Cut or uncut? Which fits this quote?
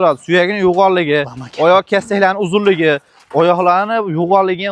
uncut